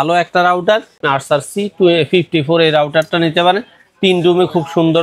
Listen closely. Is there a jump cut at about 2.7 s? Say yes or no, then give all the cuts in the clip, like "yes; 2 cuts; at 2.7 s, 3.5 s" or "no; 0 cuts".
no; 1 cut; at 1.0 s